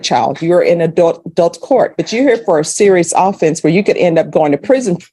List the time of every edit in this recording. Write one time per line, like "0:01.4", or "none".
0:02.0